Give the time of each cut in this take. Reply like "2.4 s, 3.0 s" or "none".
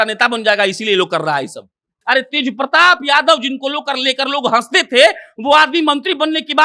2.0 s